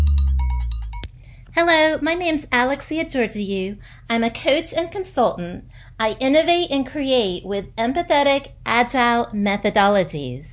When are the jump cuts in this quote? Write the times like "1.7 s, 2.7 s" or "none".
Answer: 1.0 s

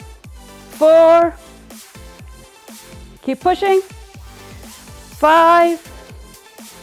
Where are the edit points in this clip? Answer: 1.4 s, 3.2 s

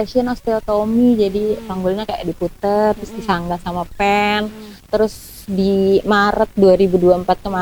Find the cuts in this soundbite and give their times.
none

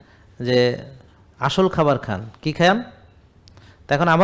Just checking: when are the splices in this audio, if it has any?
none

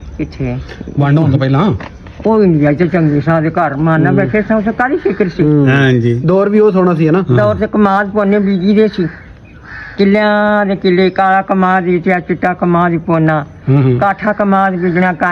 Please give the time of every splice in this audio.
none

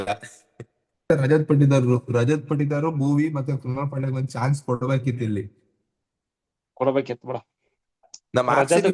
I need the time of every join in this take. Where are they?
1.1 s

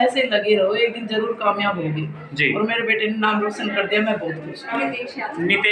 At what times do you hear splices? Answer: 4.7 s

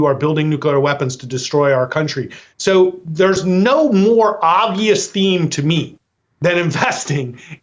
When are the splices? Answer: 2.4 s

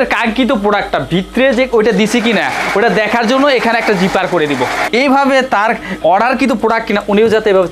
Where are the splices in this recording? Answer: none

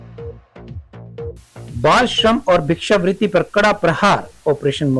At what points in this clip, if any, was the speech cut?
1.7 s

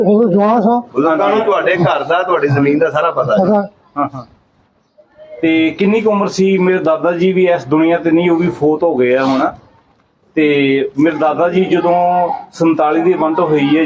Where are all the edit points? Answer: none

